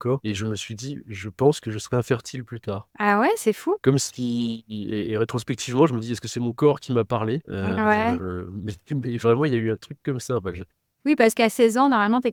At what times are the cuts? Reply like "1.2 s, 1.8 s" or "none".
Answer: none

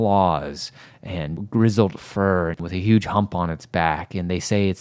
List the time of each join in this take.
1.3 s, 2.6 s

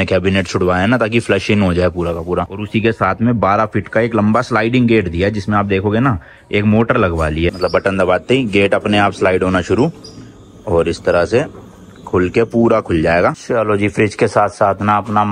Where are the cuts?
2.6 s, 7.6 s, 13.4 s

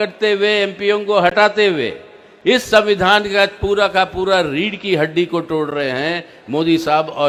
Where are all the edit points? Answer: none

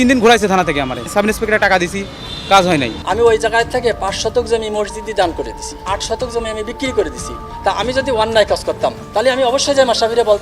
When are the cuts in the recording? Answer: 1.0 s, 3.0 s, 5.8 s, 7.4 s

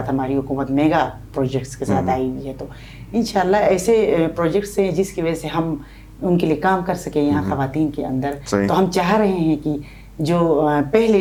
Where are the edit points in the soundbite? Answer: none

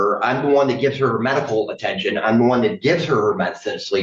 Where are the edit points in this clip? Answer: none

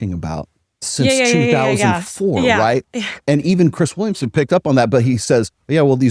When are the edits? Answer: 3.2 s

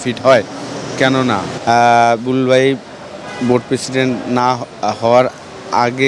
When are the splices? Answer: 1.5 s

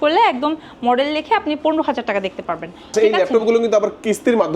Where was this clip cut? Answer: 2.9 s

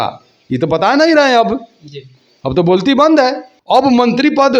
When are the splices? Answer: 3.5 s

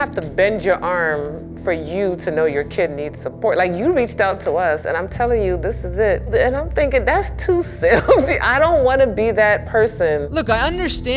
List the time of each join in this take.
none

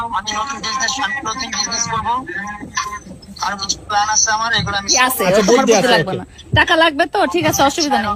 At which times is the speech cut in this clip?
5.0 s

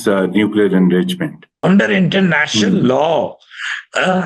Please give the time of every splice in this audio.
1.6 s

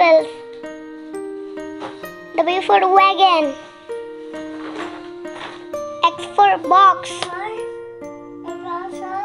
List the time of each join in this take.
none

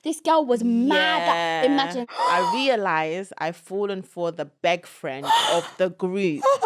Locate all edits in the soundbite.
2.0 s

